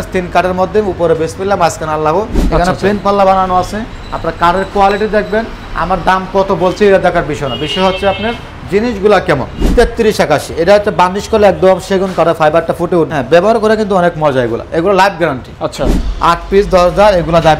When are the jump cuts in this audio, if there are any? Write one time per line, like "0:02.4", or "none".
0:02.4
0:09.7
0:13.1
0:16.0